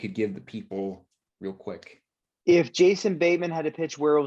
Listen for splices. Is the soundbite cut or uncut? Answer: uncut